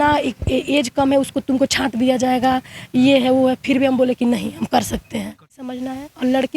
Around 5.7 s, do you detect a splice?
yes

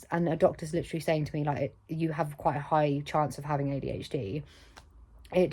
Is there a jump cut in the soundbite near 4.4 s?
no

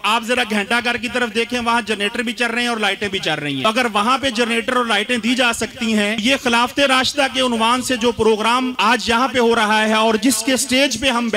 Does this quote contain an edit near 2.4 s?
no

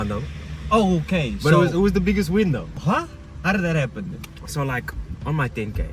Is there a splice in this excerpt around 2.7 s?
yes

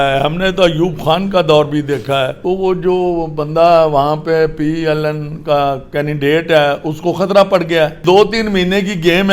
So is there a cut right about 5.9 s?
no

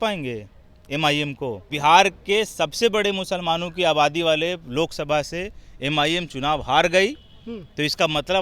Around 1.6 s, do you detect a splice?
yes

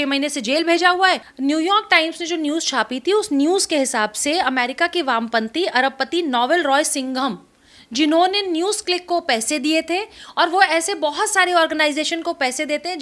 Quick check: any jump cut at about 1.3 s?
yes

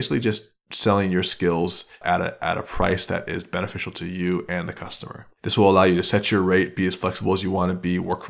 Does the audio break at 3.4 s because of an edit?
no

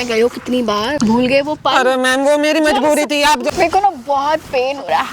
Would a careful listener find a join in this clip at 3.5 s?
yes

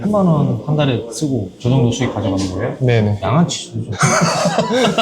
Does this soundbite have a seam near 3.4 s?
yes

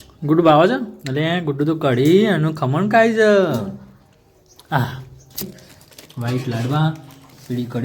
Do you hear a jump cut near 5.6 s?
yes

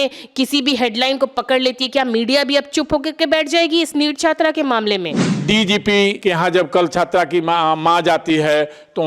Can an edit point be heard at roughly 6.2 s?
yes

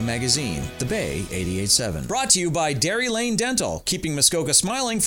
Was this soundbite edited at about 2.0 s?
yes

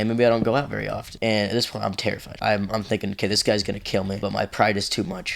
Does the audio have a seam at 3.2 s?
no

